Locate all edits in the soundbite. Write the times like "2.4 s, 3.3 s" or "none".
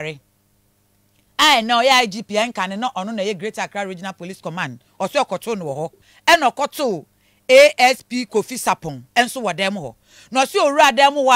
6.1 s